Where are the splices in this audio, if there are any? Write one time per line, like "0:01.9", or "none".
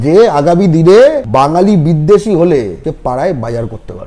0:01.2
0:02.8

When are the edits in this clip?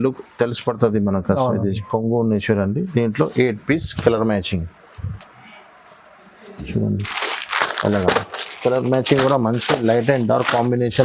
none

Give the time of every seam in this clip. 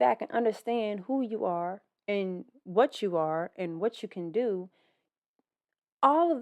none

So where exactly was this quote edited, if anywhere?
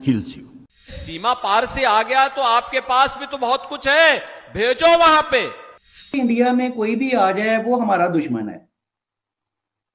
0:00.9
0:06.2

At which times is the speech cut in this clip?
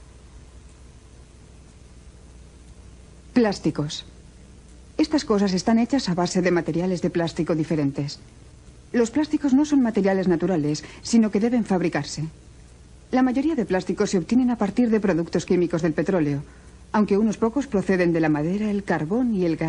0:17.4

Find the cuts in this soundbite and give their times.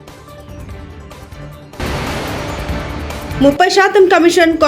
0:01.5

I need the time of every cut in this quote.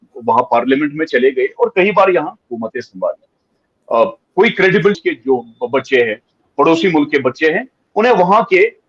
0:05.0

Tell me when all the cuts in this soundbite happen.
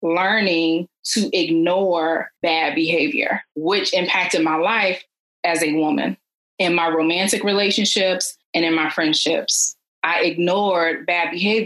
0:02.3
0:03.5

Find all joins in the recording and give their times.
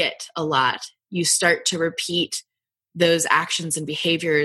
none

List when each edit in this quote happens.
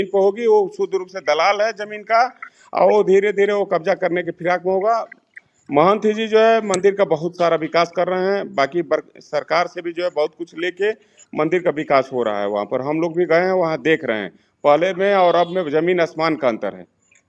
none

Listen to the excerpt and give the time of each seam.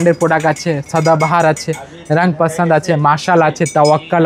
none

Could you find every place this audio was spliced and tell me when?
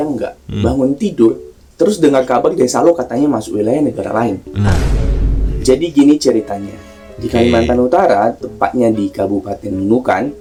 none

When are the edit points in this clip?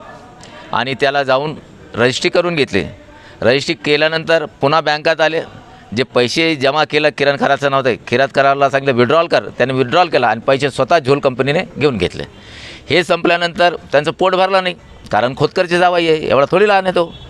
none

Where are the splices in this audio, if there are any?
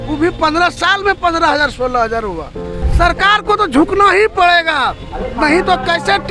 0:02.9

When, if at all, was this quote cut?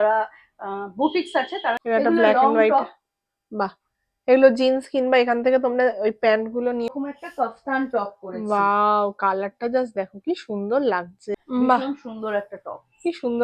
0:01.8
0:06.9
0:11.3

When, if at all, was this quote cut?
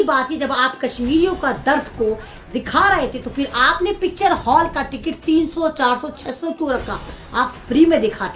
none

